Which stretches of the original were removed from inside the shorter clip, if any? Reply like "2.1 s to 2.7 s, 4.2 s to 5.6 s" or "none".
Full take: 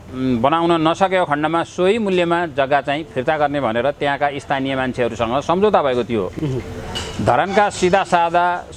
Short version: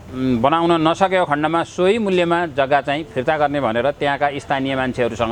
none